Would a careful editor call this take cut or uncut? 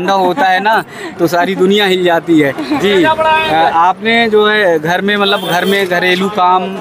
uncut